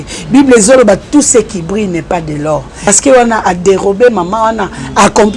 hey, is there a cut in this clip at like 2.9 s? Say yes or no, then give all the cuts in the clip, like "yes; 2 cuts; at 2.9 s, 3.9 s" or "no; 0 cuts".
yes; 1 cut; at 2.9 s